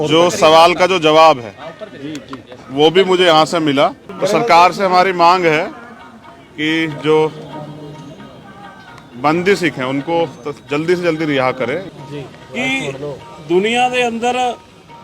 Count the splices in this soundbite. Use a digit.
2